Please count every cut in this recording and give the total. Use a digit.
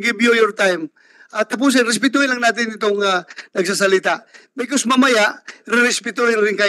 0